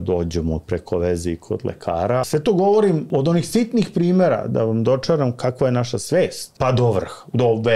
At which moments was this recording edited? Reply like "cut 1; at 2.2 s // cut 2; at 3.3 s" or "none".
cut 1; at 2.2 s // cut 2; at 3.1 s // cut 3; at 6.5 s

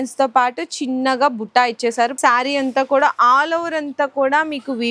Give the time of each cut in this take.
cut 1; at 2.2 s

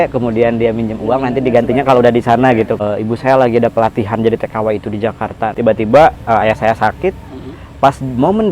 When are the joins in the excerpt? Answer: cut 1; at 2.8 s // cut 2; at 5.5 s

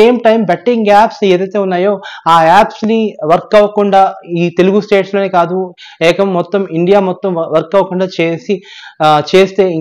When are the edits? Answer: none

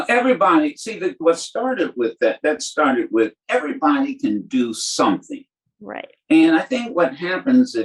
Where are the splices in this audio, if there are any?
cut 1; at 1.2 s

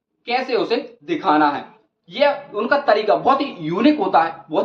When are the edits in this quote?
none

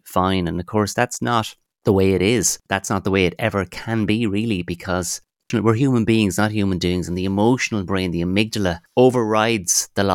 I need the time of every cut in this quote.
cut 1; at 2.6 s // cut 2; at 5.5 s // cut 3; at 8.8 s

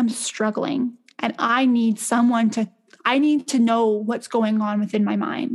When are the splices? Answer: none

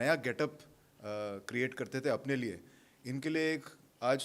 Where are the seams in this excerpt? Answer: none

